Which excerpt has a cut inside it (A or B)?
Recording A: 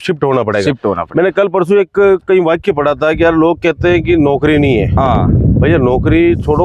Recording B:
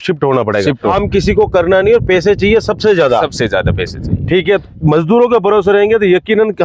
B